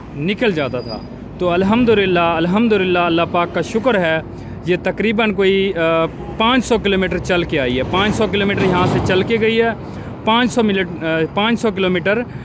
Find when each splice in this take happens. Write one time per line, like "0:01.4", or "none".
none